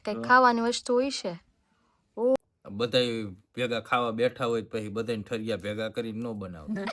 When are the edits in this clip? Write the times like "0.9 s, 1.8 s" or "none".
2.4 s